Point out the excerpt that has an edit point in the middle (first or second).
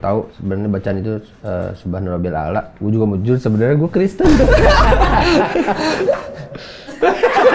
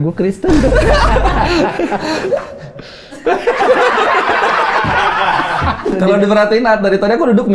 second